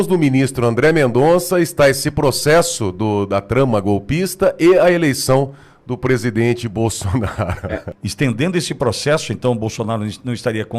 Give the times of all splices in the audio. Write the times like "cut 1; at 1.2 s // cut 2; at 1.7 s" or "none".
cut 1; at 7.8 s